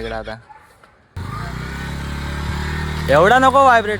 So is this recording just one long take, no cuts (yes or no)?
no